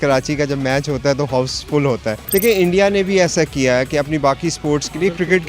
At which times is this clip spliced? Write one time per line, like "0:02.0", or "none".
0:02.2